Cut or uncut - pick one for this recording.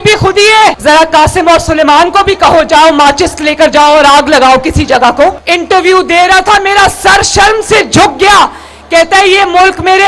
cut